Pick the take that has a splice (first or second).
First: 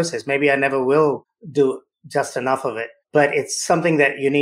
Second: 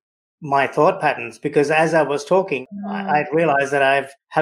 second